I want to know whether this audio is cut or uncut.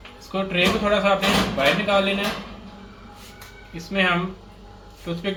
uncut